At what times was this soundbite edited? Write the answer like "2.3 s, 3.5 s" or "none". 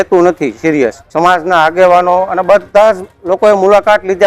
1.0 s

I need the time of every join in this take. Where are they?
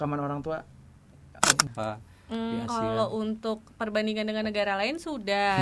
1.6 s

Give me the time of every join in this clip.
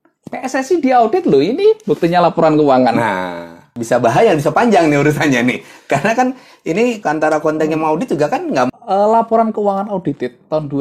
3.8 s, 7.0 s, 8.7 s

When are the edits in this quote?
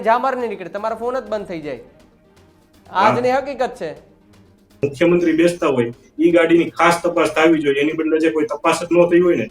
4.7 s

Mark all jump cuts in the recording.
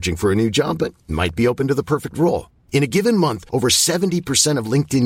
none

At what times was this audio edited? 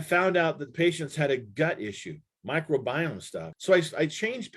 3.5 s

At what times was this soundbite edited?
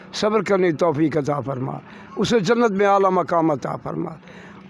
none

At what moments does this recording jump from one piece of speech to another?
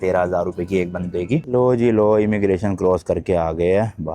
1.5 s

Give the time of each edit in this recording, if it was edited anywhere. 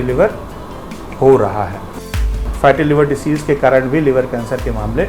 2.1 s

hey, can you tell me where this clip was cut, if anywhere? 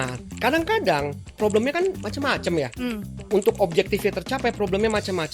2.0 s, 3.1 s

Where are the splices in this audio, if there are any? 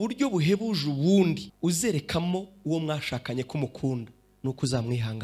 1.5 s

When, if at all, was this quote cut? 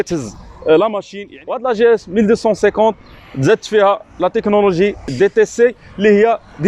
1.0 s

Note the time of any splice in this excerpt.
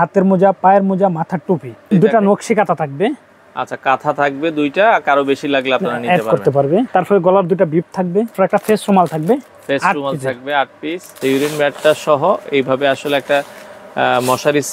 1.8 s, 6.9 s, 8.3 s, 11.2 s

